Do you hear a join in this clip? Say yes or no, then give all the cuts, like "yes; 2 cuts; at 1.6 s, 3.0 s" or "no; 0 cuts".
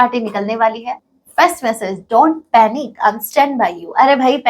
yes; 1 cut; at 1.0 s